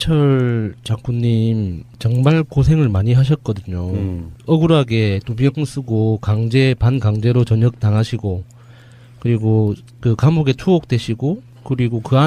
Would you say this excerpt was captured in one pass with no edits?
no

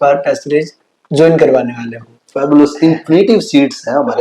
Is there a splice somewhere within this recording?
no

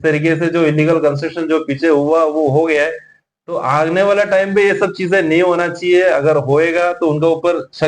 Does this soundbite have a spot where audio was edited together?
no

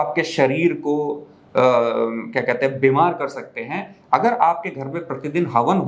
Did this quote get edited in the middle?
no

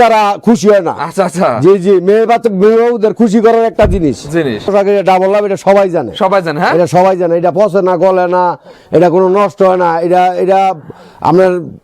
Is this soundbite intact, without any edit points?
no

